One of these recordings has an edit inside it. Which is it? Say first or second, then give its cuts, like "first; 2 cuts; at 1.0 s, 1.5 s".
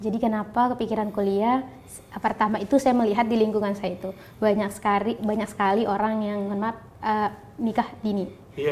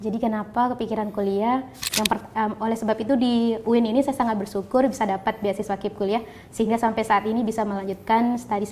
second; 1 cut; at 1.8 s